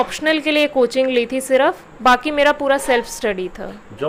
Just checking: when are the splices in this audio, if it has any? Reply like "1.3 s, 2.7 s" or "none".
none